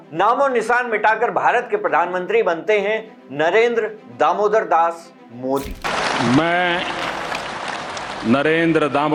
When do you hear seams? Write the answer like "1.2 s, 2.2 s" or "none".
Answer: none

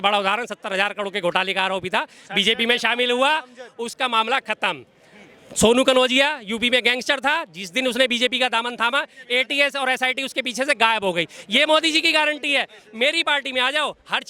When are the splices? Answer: none

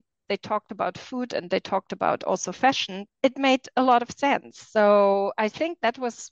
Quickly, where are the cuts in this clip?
none

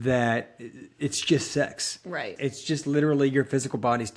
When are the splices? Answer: 2.3 s

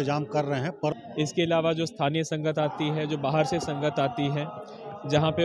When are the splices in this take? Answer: 1.0 s

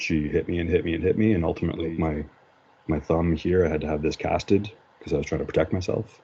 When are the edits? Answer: 1.8 s

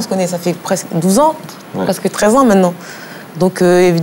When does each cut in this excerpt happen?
none

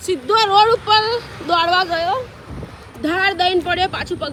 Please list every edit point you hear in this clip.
none

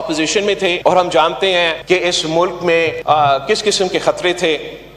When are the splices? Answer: 0.8 s, 1.8 s, 3.0 s

